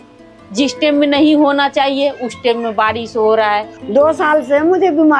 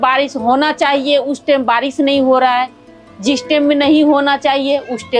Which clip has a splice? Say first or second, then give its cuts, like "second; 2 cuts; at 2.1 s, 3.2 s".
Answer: first; 1 cut; at 3.8 s